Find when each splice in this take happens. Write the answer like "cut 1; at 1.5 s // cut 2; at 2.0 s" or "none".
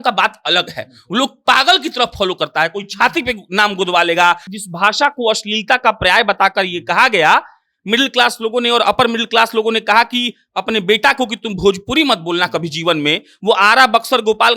cut 1; at 4.5 s